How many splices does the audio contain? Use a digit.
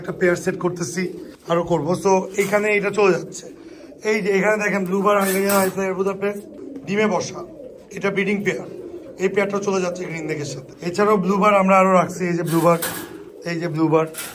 2